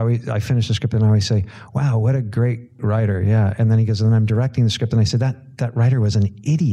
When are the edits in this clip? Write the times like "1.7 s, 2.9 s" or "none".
2.8 s